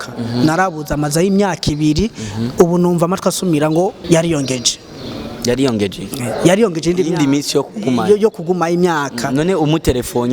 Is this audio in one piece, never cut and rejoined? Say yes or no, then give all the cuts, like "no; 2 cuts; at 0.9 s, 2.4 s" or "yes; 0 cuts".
no; 1 cut; at 4.0 s